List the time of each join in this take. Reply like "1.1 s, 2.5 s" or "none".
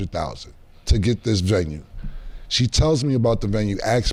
none